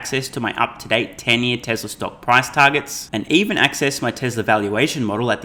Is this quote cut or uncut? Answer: uncut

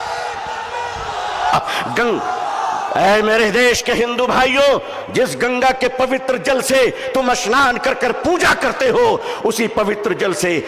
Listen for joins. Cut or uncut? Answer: cut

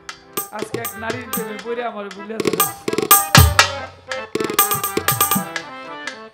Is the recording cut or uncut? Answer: uncut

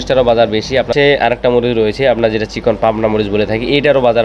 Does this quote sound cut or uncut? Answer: cut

